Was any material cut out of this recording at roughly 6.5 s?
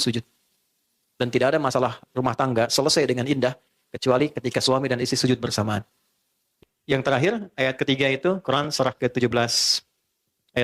yes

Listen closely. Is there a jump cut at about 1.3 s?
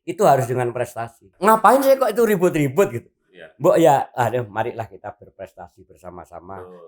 yes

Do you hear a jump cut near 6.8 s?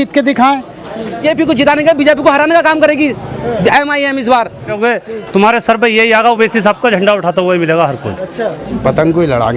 no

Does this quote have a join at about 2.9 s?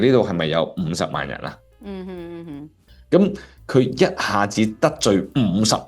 yes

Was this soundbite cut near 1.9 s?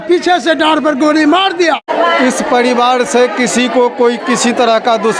yes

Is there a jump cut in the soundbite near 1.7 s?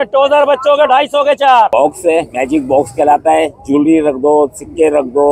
yes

